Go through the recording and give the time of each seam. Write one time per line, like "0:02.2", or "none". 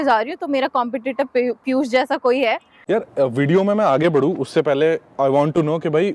0:02.7